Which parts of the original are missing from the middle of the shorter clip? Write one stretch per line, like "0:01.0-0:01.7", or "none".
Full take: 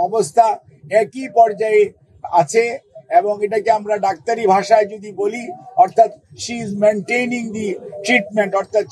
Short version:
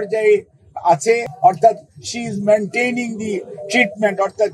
0:02.8-0:05.6